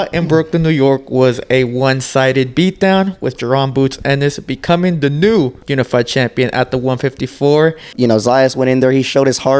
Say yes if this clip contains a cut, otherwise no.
yes